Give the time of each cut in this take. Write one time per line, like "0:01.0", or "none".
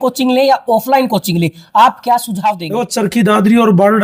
0:02.7